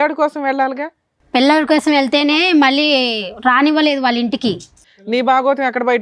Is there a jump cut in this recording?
yes; 1 cut; at 4.8 s

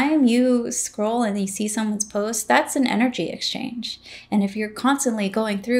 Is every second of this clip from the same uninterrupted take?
yes; 0 cuts

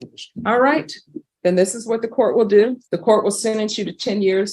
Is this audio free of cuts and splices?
no; 1 cut; at 2.9 s

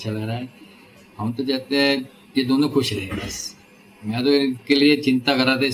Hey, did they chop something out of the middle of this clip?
no; 0 cuts

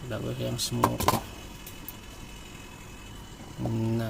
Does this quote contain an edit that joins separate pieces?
no; 0 cuts

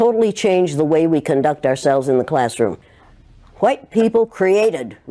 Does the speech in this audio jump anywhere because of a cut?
yes; 1 cut; at 2.9 s

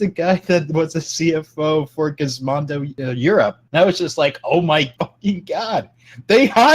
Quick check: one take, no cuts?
no; 2 cuts; at 3.1 s, 4.9 s

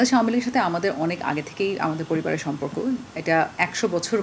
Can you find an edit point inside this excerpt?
no; 0 cuts

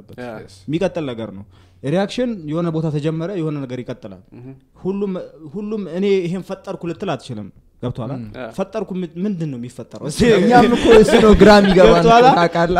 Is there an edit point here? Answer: no; 0 cuts

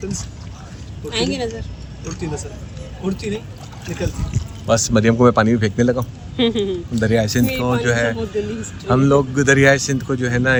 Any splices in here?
no; 0 cuts

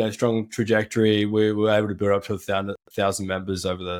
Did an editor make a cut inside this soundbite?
no; 0 cuts

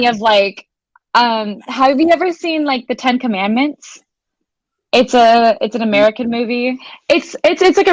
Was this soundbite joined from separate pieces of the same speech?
yes; 1 cut; at 6.9 s

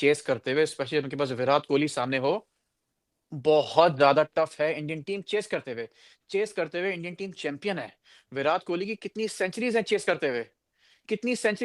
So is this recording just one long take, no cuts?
yes; 0 cuts

